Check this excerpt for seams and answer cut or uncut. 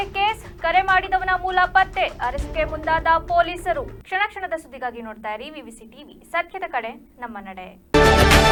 uncut